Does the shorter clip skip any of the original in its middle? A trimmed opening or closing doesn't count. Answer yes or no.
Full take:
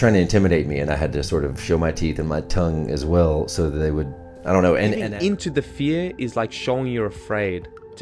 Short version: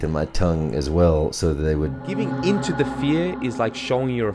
yes